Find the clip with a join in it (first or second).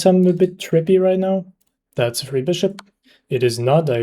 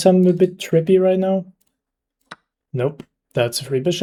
first